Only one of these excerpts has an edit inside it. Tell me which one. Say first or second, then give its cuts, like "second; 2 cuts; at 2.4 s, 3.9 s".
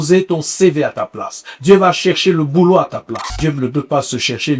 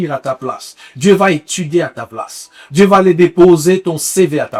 first; 1 cut; at 3.3 s